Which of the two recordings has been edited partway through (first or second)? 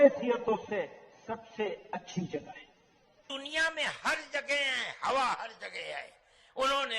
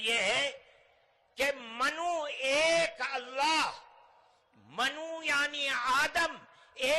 first